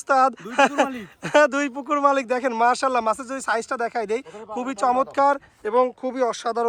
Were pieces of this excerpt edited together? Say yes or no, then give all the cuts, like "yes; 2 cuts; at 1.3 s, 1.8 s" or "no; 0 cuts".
no; 0 cuts